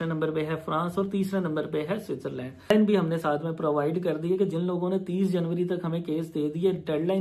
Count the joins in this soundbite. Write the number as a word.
one